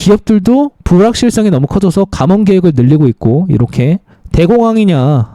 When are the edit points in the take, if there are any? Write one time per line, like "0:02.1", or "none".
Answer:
0:04.2